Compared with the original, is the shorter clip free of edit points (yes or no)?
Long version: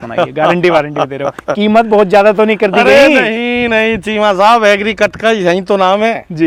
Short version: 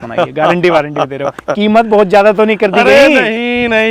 yes